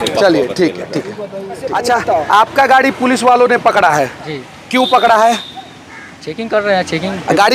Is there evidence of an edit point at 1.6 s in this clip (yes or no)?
yes